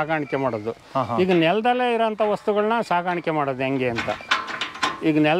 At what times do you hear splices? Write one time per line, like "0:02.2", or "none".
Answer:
none